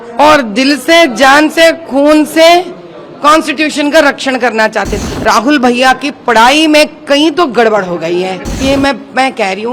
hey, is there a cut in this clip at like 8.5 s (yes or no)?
yes